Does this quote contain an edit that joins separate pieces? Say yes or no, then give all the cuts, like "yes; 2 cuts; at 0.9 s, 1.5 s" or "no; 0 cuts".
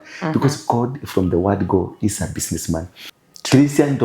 yes; 1 cut; at 3.0 s